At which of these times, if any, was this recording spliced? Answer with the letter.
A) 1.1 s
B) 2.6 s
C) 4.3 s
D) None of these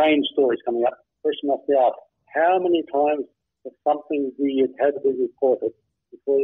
A